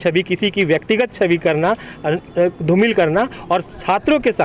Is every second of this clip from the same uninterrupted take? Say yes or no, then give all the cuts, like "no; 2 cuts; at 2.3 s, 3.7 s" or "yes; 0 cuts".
yes; 0 cuts